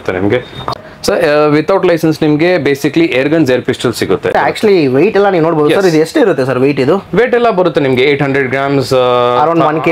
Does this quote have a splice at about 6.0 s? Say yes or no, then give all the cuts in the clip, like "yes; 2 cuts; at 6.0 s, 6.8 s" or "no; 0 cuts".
no; 2 cuts; at 0.8 s, 4.3 s